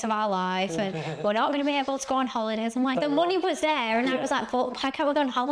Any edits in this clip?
yes; 1 cut; at 3.0 s

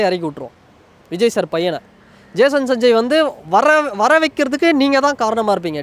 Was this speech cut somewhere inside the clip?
no; 0 cuts

